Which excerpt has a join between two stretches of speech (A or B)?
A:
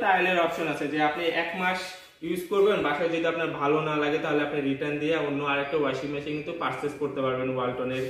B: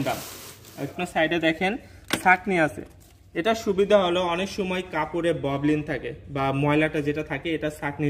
B